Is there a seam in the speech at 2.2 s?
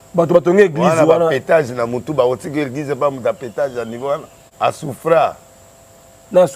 no; 1 cut; at 4.4 s

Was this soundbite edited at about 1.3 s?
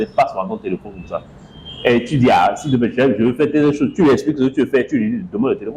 no; 0 cuts

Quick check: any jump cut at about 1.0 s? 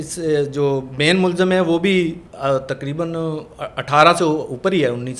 no; 1 cut; at 2.3 s

